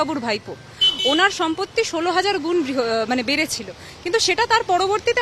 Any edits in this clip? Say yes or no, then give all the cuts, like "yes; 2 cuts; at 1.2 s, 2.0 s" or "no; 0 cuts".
no; 0 cuts